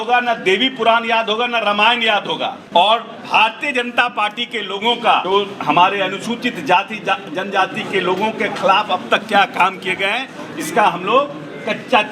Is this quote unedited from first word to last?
no; 2 cuts; at 2.6 s, 5.2 s

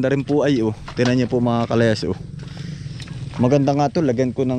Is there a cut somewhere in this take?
no; 0 cuts

